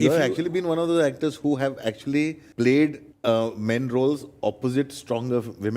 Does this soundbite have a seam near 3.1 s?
yes; 2 cuts; at 2.4 s, 3.1 s

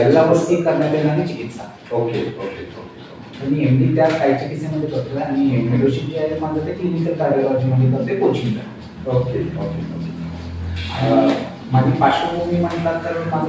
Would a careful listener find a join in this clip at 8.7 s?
no; 0 cuts

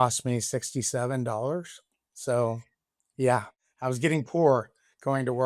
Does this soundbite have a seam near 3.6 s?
yes; 1 cut; at 3.6 s

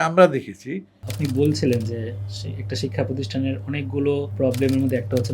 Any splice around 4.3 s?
yes; 2 cuts; at 1.1 s, 4.3 s

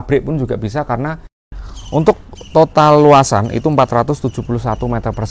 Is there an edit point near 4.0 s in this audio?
no; 1 cut; at 1.3 s

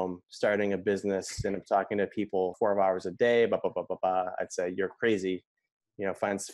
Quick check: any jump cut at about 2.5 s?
yes; 1 cut; at 2.5 s

